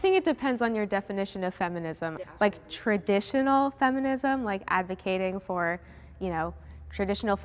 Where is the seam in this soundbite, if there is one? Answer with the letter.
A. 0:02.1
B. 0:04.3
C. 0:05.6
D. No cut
A